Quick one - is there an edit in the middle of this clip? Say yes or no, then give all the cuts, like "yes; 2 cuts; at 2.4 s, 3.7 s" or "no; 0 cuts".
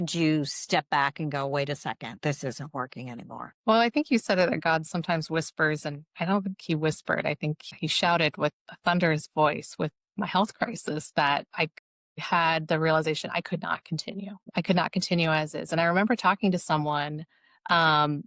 no; 0 cuts